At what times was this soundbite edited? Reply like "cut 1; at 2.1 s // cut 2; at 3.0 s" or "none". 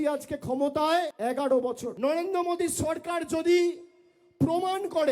cut 1; at 1.1 s // cut 2; at 1.9 s